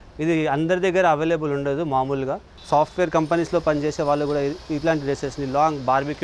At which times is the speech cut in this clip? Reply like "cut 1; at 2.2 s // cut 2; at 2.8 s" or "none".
cut 1; at 2.5 s